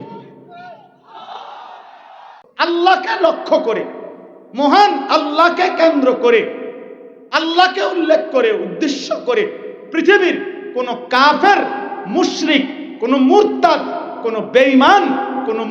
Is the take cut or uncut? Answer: cut